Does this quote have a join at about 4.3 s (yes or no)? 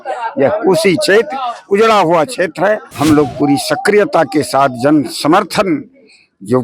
no